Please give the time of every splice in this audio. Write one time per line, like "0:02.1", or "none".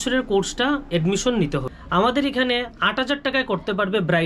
0:01.7

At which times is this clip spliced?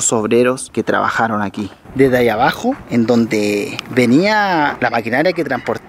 0:01.8

